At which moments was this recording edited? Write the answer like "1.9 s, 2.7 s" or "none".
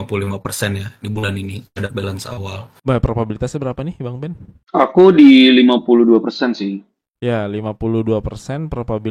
2.8 s